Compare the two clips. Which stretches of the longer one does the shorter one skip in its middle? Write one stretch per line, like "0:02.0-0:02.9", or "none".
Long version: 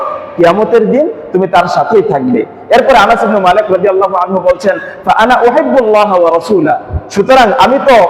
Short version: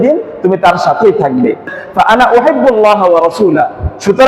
0:02.6-0:04.8